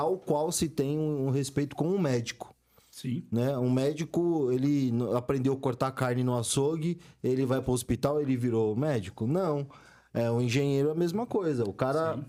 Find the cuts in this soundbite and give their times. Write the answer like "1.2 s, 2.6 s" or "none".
none

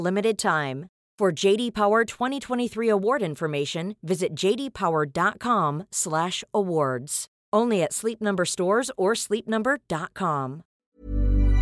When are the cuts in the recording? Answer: 10.7 s

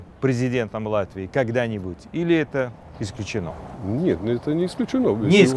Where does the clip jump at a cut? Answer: none

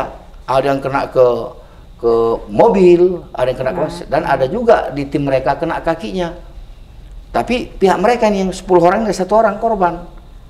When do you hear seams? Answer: none

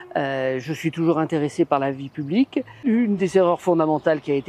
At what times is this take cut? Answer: 2.8 s

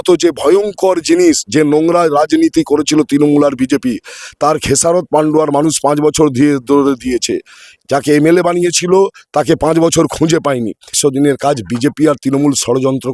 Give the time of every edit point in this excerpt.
11.0 s

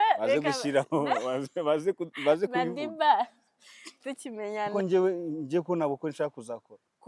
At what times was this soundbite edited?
4.9 s

